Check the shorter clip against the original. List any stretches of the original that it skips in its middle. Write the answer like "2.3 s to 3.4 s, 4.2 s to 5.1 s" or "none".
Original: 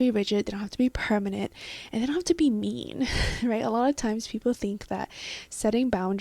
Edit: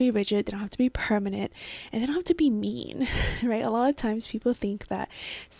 none